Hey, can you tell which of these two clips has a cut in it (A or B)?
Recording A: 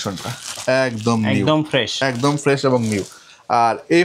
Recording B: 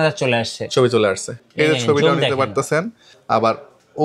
B